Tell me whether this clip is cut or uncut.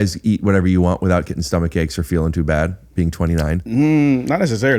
cut